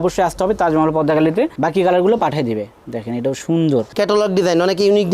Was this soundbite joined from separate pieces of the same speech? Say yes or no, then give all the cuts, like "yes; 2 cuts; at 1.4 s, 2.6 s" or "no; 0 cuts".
yes; 2 cuts; at 1.5 s, 3.9 s